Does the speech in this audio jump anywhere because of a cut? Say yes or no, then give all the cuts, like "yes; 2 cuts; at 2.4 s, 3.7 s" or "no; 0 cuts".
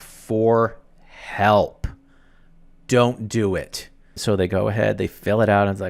yes; 1 cut; at 4.2 s